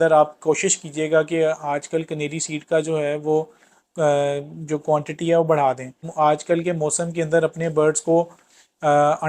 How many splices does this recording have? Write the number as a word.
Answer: one